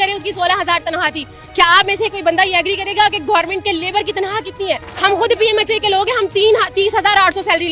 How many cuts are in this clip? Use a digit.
1